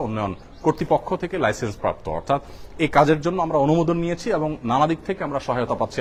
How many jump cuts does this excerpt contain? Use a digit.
0